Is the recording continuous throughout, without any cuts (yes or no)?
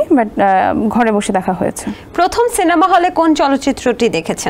yes